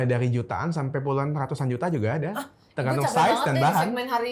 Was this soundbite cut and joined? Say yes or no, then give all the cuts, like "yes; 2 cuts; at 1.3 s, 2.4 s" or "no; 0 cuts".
no; 0 cuts